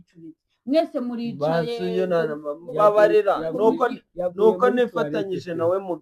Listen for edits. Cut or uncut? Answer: uncut